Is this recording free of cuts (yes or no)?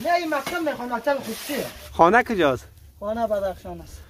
no